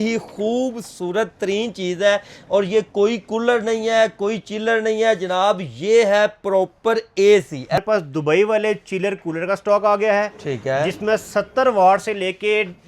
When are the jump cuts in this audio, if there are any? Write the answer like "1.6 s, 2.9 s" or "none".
7.8 s